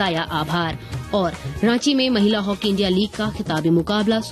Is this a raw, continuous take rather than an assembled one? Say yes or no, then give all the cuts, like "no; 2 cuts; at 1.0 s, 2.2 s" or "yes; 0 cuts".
yes; 0 cuts